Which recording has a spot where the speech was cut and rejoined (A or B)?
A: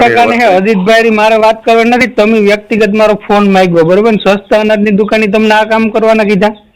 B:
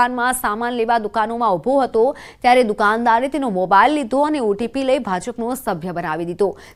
A